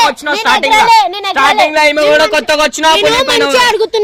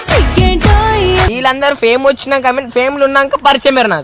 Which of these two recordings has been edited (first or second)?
second